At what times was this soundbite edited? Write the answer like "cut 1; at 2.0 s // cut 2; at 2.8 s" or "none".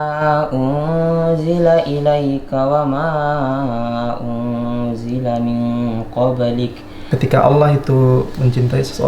cut 1; at 6.9 s